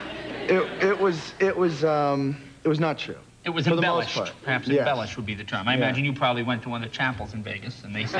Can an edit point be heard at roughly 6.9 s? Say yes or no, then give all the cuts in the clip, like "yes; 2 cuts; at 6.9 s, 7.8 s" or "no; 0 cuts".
yes; 1 cut; at 6.9 s